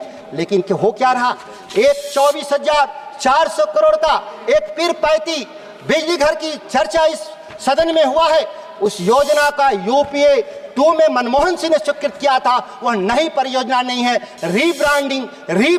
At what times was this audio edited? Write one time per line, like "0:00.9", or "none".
none